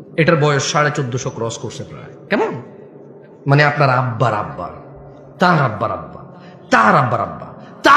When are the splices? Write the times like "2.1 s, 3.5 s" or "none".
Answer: none